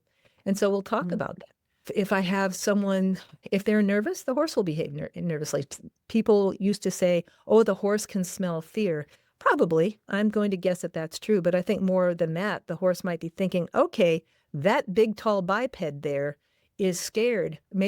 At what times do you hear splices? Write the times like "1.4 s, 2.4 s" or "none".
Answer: 3.3 s